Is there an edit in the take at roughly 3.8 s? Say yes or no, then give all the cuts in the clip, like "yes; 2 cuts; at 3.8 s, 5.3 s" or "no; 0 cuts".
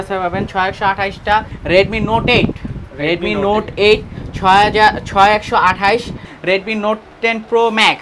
no; 2 cuts; at 1.5 s, 6.2 s